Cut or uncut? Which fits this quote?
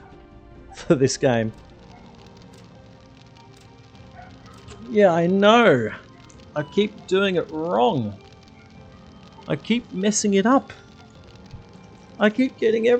cut